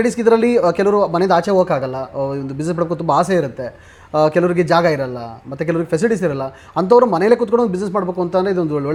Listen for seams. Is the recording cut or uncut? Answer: uncut